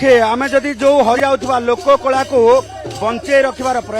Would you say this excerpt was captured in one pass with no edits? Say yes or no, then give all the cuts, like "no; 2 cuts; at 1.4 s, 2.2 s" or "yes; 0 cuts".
no; 1 cut; at 1.2 s